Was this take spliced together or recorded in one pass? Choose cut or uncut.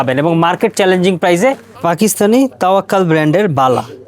cut